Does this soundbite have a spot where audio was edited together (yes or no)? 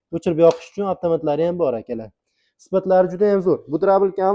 no